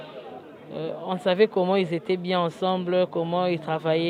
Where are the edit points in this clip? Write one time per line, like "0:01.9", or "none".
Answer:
none